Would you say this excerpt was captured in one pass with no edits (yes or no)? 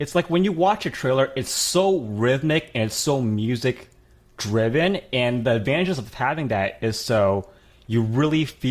yes